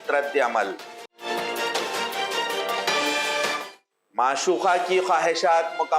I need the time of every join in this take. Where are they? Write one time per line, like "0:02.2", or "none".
none